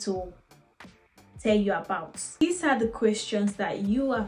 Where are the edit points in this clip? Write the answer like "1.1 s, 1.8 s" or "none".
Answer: 2.3 s